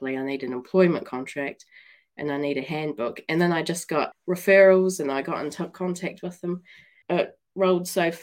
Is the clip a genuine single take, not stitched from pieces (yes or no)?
no